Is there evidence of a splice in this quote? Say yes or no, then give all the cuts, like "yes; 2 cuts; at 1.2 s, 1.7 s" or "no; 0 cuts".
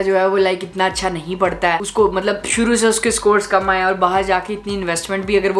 no; 0 cuts